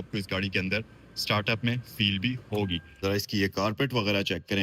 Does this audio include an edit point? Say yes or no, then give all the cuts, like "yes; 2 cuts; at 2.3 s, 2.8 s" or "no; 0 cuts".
yes; 1 cut; at 2.9 s